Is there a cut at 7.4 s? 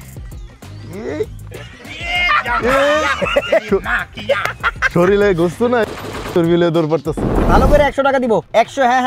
yes; 1 cut; at 7.4 s

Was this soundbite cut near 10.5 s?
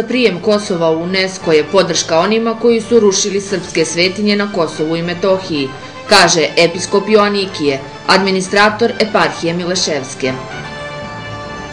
no; 0 cuts

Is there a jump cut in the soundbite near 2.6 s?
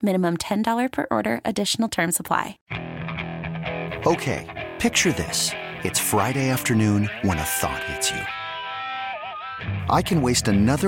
yes; 1 cut; at 2.6 s

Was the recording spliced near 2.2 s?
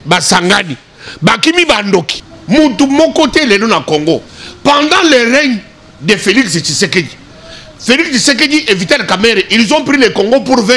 yes; 1 cut; at 2.2 s

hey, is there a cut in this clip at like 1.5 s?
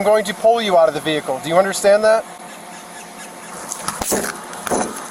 no; 1 cut; at 3.5 s

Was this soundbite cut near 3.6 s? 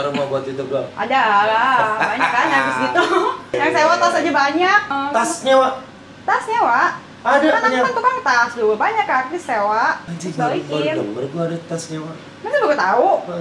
yes; 3 cuts; at 3.6 s, 4.9 s, 10.1 s

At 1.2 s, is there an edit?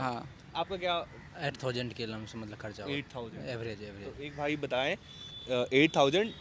no; 0 cuts

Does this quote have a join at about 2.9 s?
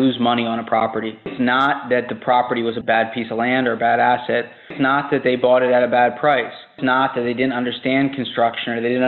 no; 3 cuts; at 1.3 s, 4.7 s, 6.8 s

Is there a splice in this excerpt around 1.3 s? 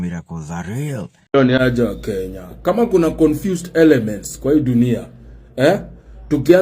yes; 1 cut; at 1.3 s

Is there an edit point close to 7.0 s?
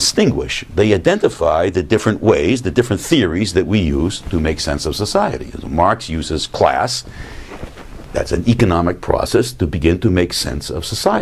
no; 1 cut; at 2.4 s

